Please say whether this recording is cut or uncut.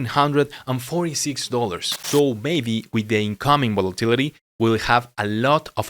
cut